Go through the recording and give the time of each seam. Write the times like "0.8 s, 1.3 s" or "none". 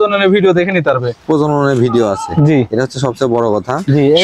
none